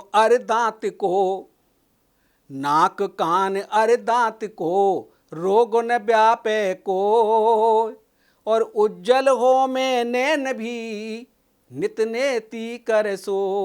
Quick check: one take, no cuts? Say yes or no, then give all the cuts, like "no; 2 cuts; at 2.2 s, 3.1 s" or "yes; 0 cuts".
yes; 0 cuts